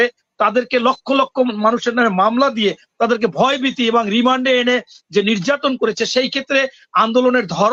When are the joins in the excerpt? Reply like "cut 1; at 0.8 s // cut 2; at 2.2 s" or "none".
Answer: none